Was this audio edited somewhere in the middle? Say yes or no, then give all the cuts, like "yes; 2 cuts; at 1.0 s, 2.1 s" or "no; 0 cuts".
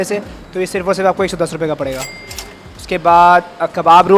no; 0 cuts